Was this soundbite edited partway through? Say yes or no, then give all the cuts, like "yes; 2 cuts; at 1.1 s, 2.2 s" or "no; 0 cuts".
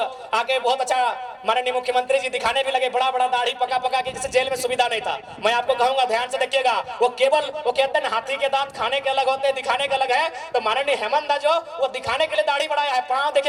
no; 0 cuts